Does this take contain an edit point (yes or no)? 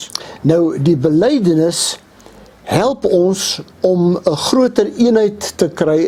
no